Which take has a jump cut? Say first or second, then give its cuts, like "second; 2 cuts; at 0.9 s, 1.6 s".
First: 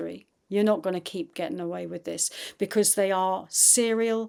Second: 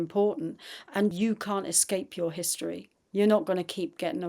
second; 1 cut; at 1.1 s